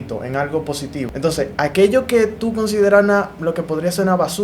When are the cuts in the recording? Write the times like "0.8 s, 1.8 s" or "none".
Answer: 0.9 s

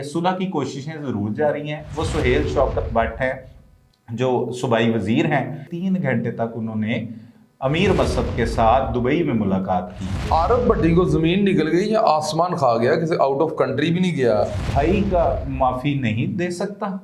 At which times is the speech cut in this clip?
5.6 s, 10.2 s, 14.6 s

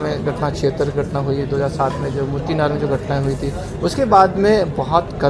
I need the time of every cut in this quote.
none

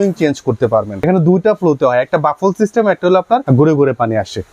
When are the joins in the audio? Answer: 1.0 s, 3.4 s

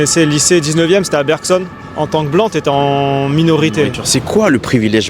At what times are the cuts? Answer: 1.8 s, 4.0 s

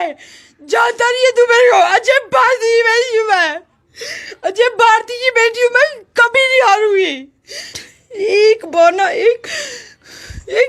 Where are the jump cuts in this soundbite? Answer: 7.9 s

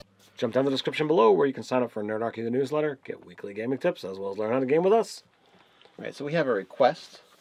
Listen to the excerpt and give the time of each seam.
none

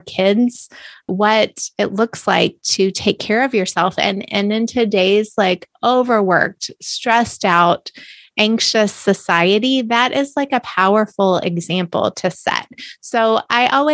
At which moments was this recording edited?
1.1 s

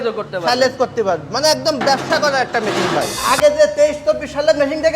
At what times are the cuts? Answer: 3.3 s

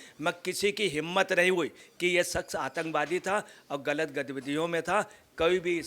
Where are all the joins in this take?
1.9 s

